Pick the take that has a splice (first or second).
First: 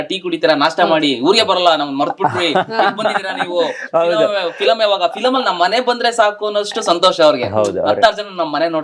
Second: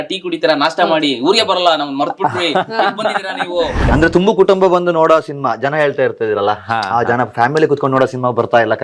second